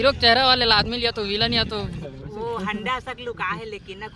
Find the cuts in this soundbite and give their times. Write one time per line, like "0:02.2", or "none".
0:02.0